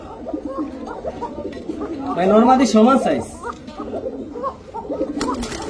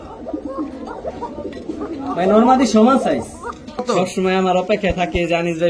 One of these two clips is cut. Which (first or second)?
second